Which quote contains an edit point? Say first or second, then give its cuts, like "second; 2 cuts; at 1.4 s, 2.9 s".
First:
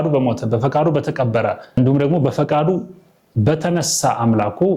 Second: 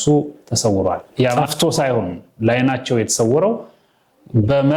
second; 1 cut; at 1.4 s